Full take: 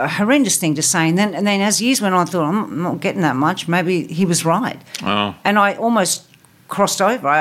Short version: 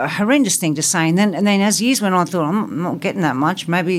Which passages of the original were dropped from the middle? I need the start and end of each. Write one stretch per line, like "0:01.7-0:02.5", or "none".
none